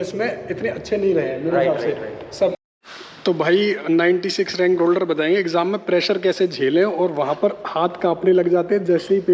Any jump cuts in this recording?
yes; 1 cut; at 2.6 s

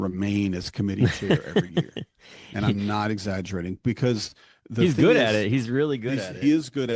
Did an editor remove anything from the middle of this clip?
no; 0 cuts

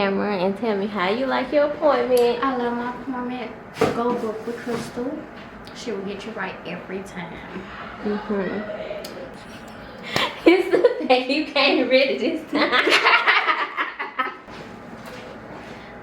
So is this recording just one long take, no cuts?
no; 2 cuts; at 9.4 s, 14.4 s

